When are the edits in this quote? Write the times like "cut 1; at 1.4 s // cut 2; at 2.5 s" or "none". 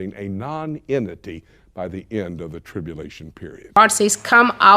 cut 1; at 3.8 s